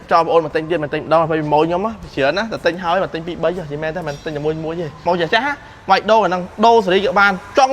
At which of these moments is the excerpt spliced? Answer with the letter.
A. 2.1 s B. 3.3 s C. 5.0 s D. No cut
C